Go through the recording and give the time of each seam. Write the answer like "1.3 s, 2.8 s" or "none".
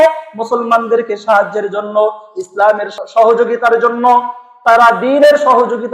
2.9 s